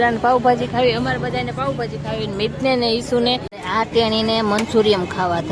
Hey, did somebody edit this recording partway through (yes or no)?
yes